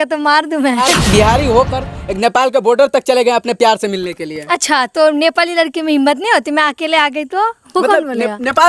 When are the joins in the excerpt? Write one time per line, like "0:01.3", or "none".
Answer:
0:00.9